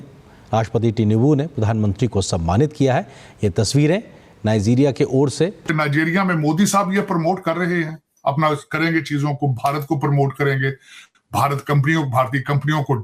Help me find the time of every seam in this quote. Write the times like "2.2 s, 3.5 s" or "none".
5.6 s